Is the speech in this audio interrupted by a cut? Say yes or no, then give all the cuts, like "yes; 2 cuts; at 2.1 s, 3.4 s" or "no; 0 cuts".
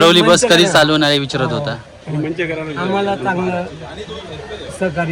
no; 0 cuts